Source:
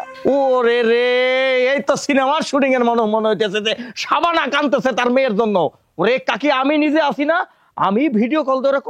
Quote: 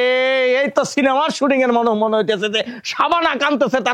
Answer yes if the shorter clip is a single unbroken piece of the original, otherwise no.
yes